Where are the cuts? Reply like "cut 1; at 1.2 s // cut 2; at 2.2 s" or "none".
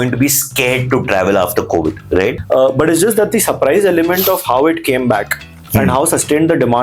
cut 1; at 2.4 s

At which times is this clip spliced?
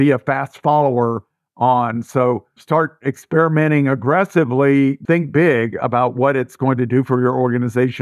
cut 1; at 2.5 s // cut 2; at 5.0 s

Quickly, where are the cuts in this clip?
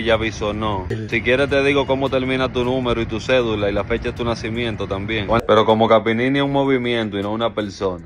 cut 1; at 1.0 s // cut 2; at 5.4 s

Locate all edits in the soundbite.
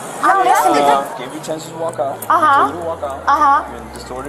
cut 1; at 1.1 s

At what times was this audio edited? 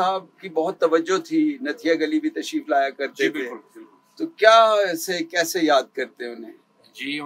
none

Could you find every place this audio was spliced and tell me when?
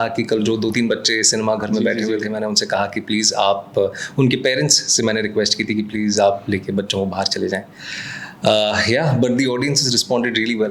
none

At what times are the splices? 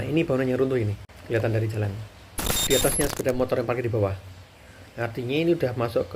cut 1; at 1.1 s // cut 2; at 2.6 s

